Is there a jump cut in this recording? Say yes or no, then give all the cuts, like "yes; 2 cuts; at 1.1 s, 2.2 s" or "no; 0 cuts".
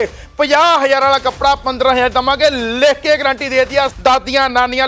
no; 0 cuts